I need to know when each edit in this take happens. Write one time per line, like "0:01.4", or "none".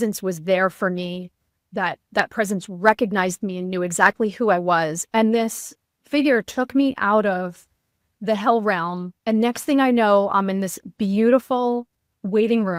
none